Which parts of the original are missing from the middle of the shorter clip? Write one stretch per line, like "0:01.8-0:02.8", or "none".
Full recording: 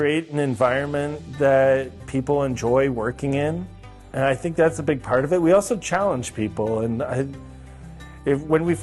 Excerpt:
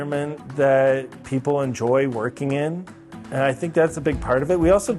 none